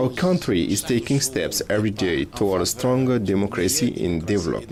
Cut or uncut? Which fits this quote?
uncut